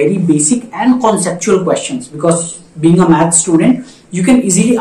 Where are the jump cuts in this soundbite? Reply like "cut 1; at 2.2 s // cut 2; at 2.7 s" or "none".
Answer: none